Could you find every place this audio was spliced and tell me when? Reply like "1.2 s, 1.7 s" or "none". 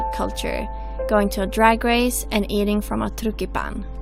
none